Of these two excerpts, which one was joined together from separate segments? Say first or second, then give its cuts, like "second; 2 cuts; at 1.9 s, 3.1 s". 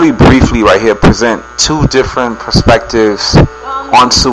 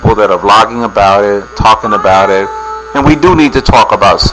first; 1 cut; at 2.3 s